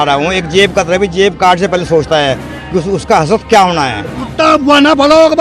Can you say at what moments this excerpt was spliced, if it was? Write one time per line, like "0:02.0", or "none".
0:04.2

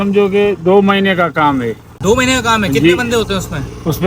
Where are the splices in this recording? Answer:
none

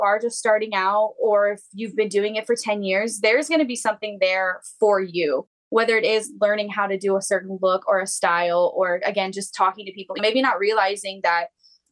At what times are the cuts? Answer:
0:10.2

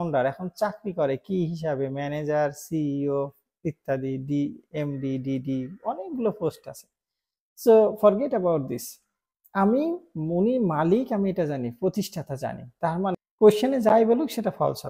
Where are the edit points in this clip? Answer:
0:13.1

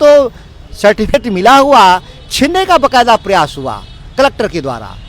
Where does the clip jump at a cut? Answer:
0:01.1

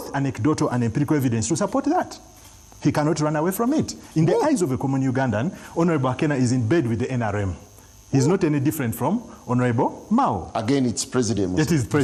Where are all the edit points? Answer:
none

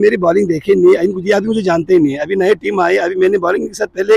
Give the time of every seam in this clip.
none

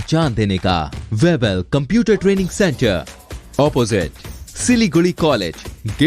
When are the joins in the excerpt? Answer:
0:01.0

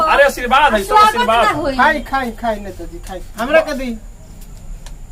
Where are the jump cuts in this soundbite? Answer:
none

